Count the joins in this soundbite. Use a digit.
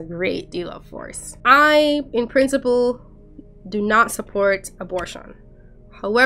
0